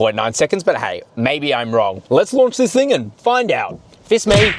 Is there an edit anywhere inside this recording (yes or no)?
no